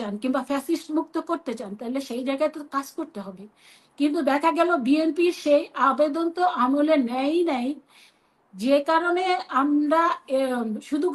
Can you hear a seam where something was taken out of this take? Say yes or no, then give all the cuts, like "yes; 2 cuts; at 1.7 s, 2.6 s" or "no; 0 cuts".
no; 0 cuts